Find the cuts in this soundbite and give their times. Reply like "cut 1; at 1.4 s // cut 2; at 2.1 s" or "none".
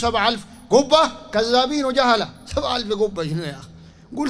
none